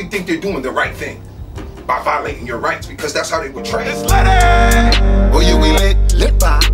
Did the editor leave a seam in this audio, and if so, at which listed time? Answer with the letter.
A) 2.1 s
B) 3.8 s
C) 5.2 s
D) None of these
B